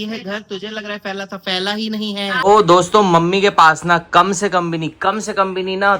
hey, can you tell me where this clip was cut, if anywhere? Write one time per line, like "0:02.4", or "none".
0:02.4